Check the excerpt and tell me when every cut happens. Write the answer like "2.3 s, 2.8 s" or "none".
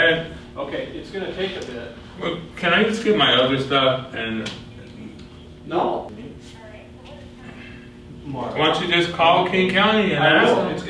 6.1 s